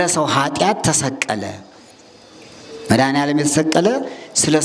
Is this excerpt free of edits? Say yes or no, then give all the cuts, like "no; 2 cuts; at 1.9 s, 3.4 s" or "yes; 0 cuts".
yes; 0 cuts